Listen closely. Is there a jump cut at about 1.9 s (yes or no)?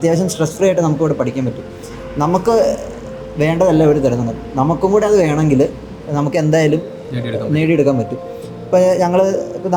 no